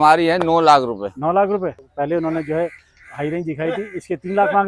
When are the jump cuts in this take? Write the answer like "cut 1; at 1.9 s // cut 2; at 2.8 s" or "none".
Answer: cut 1; at 1.8 s